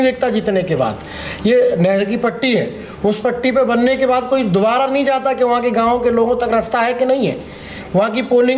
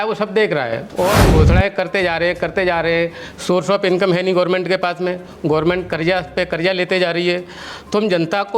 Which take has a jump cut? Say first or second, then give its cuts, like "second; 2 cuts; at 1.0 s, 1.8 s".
second; 1 cut; at 1.3 s